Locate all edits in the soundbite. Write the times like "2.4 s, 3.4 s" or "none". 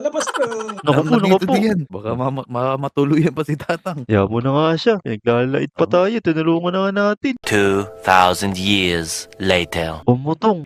none